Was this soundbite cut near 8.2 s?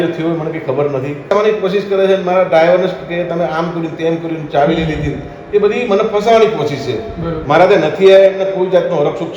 no; 1 cut; at 1.3 s

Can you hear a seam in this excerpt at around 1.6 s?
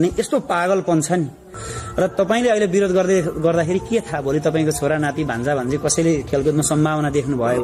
yes; 1 cut; at 1.6 s

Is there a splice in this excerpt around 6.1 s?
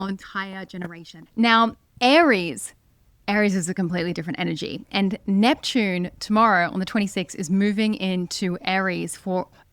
no; 1 cut; at 1.1 s

